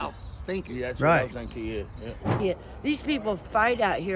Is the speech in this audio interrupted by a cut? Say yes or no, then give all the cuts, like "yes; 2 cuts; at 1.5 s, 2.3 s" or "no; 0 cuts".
yes; 1 cut; at 2.4 s